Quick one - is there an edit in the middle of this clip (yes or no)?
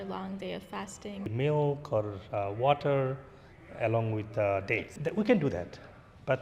yes